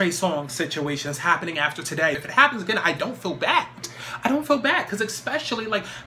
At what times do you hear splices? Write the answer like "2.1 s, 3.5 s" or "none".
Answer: 2.2 s